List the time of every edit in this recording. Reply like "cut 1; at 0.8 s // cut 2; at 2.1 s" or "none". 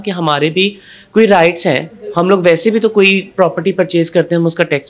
none